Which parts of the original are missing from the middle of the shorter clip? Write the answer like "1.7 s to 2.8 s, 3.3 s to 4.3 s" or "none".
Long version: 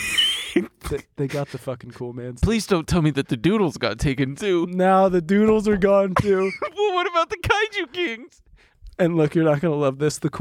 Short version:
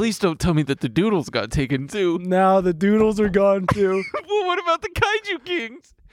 none